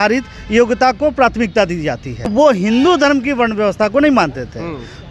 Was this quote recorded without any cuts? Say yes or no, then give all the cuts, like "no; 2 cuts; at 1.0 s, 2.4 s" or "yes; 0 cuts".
no; 1 cut; at 2.3 s